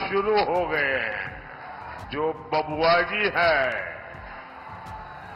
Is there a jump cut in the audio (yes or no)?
yes